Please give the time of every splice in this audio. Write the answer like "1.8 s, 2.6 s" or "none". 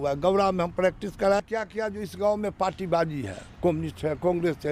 1.4 s